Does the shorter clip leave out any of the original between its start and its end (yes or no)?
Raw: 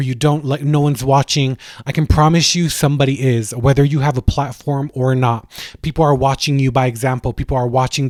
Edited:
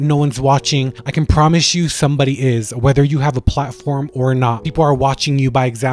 yes